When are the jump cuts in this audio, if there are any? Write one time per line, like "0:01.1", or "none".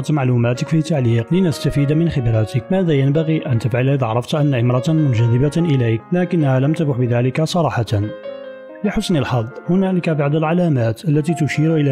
0:01.2
0:02.6
0:06.0